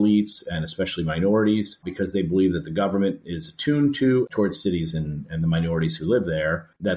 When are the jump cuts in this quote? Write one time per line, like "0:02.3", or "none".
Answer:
0:01.8
0:04.3